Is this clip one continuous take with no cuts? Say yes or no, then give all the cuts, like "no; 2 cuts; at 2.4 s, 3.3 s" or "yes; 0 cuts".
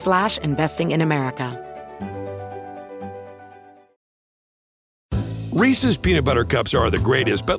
no; 1 cut; at 1.5 s